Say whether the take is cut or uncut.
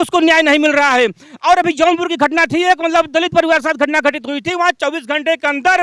uncut